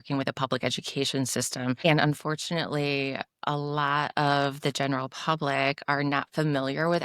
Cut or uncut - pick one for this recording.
cut